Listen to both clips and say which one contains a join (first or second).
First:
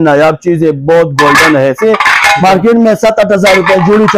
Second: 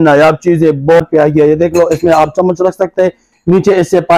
second